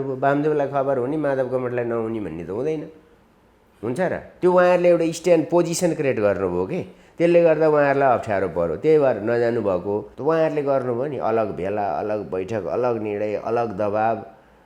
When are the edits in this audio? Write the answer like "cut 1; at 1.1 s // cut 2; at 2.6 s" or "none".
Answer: cut 1; at 10.1 s